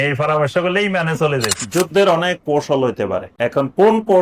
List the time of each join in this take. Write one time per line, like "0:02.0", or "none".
0:01.6
0:03.3